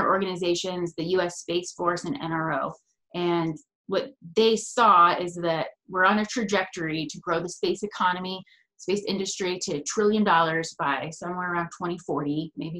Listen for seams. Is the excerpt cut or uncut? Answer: uncut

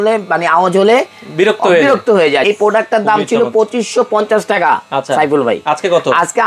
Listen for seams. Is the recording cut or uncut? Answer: cut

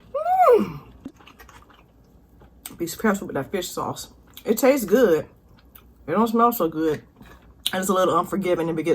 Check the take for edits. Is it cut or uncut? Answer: cut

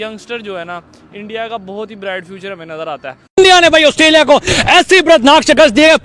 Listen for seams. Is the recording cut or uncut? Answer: cut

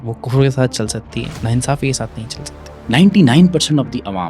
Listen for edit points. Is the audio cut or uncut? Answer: cut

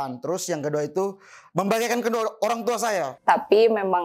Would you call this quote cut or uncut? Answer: cut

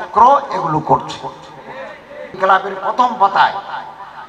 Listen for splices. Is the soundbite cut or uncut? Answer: cut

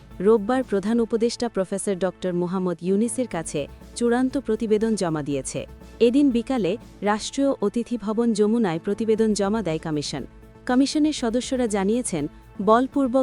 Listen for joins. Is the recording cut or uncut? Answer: uncut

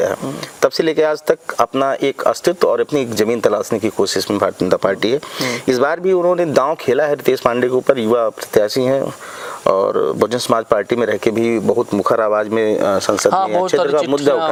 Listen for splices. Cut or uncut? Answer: uncut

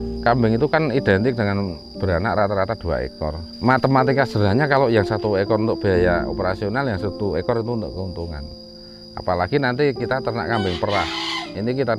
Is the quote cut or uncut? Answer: uncut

